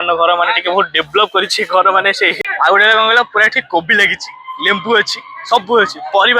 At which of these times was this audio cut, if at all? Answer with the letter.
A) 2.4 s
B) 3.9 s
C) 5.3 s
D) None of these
A